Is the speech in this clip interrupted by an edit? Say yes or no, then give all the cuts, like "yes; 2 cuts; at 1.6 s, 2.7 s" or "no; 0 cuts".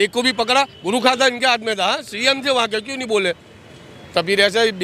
no; 0 cuts